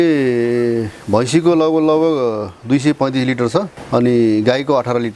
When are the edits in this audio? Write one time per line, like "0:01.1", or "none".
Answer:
0:03.8